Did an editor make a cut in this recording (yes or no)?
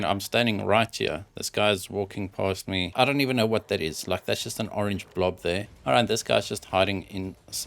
yes